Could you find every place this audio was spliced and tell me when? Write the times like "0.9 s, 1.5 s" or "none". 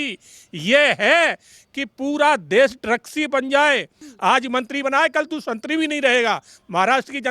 4.0 s